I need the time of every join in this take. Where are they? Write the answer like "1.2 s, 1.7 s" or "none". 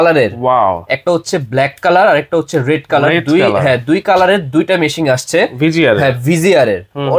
none